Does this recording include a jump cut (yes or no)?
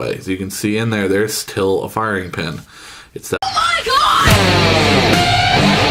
no